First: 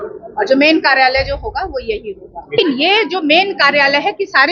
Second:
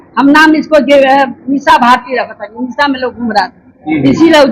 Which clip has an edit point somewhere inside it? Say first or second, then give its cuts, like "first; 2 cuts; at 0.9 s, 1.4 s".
first; 1 cut; at 2.6 s